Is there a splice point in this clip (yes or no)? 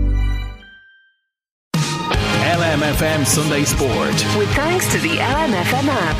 yes